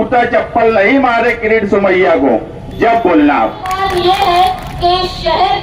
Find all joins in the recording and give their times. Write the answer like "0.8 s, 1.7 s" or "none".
3.8 s